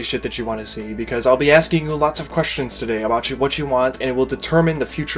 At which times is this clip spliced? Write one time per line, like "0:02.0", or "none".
0:03.9

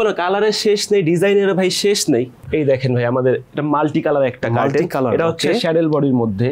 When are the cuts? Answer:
0:02.4

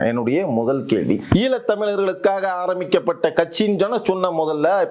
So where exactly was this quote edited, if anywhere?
0:01.3

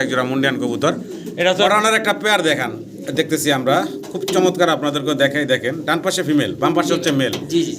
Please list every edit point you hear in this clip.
0:01.6

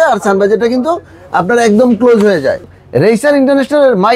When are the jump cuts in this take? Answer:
0:02.7

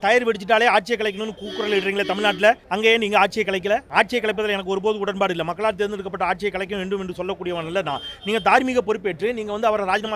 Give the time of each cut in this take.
0:02.7
0:03.9

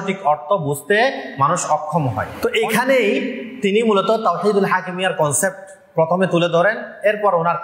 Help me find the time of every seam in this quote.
0:02.3

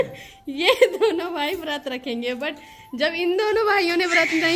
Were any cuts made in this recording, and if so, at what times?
none

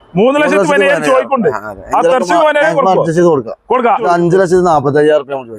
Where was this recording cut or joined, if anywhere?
0:04.0

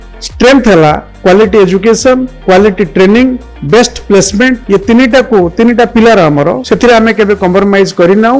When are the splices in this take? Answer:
0:01.1
0:02.3
0:03.5
0:04.6
0:06.6

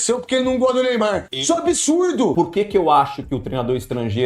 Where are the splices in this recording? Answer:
0:01.3
0:02.3

